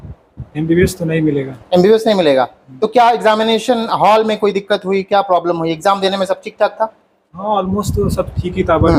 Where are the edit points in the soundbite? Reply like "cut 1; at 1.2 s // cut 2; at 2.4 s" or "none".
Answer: none